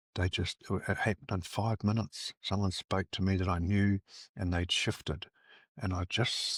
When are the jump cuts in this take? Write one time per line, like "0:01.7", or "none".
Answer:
none

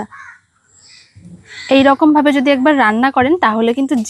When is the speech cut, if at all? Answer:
0:01.5

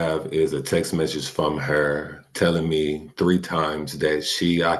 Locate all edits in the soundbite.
none

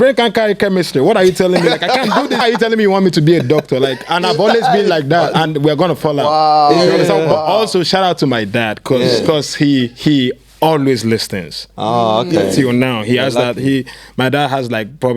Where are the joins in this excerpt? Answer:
0:02.4

